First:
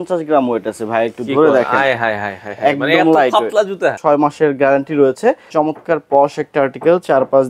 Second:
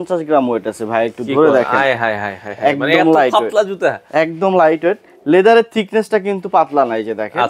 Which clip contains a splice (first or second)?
first